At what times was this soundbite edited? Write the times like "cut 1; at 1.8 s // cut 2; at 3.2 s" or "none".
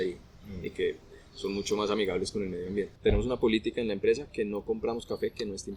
cut 1; at 2.9 s